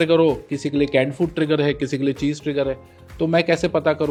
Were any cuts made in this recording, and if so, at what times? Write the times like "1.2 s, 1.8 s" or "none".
none